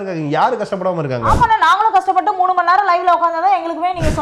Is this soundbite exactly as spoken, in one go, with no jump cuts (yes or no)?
yes